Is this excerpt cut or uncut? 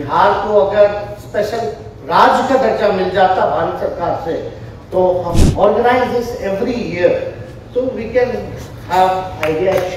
cut